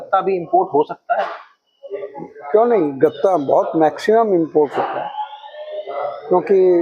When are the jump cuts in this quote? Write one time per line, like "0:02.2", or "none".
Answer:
none